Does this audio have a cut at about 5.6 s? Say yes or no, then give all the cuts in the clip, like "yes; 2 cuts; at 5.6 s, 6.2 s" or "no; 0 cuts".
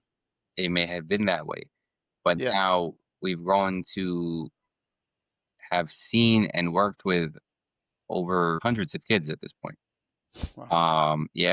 no; 1 cut; at 8.6 s